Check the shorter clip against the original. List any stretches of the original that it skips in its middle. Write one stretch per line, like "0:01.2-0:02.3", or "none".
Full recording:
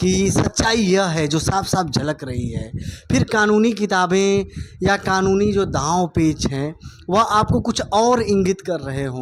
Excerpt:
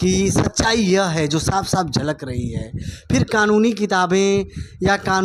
none